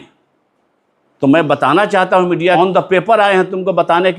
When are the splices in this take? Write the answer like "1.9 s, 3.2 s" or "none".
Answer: 2.6 s